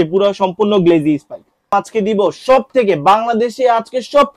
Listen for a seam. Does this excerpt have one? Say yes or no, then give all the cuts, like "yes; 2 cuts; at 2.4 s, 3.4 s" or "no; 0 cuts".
yes; 1 cut; at 1.7 s